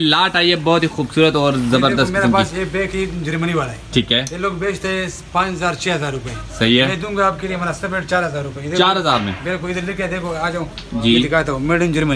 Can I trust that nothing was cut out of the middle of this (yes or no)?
yes